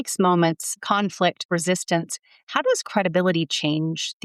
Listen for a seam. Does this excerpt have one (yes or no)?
yes